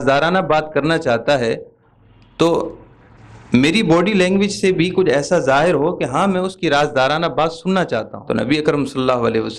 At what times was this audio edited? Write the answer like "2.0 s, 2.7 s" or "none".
8.1 s